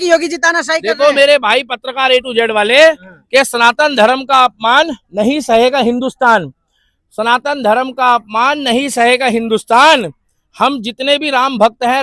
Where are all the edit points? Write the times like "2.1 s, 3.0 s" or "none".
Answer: none